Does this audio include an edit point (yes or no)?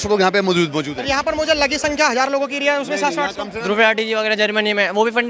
yes